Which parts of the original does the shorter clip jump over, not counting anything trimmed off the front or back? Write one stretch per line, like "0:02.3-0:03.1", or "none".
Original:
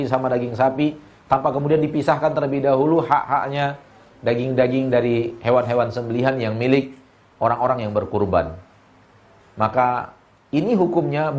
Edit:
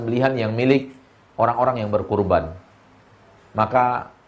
none